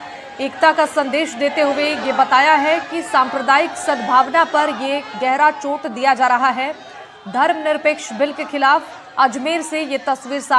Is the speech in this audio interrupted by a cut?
no; 0 cuts

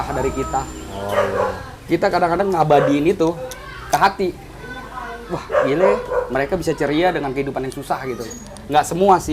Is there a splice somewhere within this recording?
no; 0 cuts

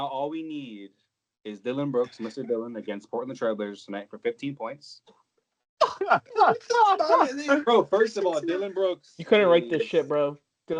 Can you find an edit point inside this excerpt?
no; 0 cuts

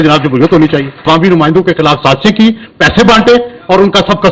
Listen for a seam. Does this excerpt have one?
yes; 1 cut; at 1.1 s

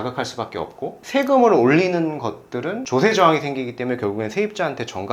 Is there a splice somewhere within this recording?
yes; 1 cut; at 2.8 s

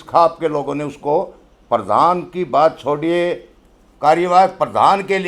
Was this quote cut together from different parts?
no; 0 cuts

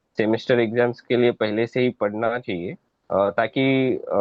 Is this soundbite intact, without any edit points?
yes; 0 cuts

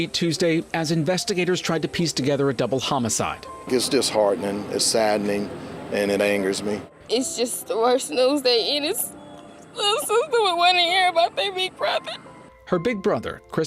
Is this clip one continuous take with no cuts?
no; 1 cut; at 7.0 s

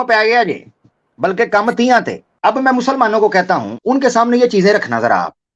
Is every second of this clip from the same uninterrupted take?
no; 2 cuts; at 2.2 s, 3.7 s

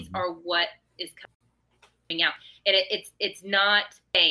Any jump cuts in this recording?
no; 0 cuts

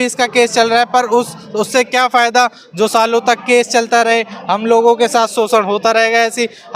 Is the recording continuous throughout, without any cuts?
yes; 0 cuts

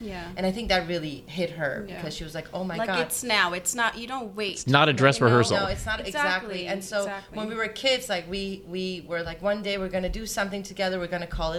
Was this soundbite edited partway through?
no; 0 cuts

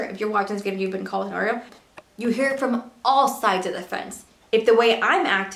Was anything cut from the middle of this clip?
yes; 2 cuts; at 1.7 s, 4.3 s

